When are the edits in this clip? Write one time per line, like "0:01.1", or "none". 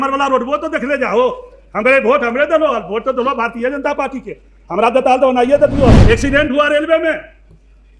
0:06.0